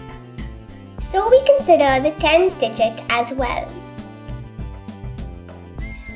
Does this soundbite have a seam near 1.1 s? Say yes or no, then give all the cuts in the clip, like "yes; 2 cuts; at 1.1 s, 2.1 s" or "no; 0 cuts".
no; 0 cuts